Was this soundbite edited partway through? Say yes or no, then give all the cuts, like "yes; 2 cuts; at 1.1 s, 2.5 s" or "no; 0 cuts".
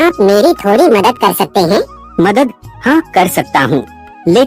yes; 1 cut; at 2.0 s